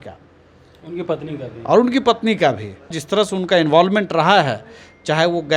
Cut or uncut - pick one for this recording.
cut